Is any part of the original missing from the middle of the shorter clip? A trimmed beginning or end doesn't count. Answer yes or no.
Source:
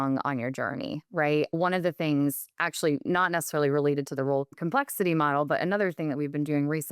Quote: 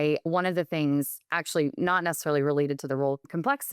no